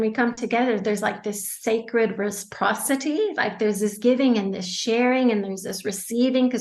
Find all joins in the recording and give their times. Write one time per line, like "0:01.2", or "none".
none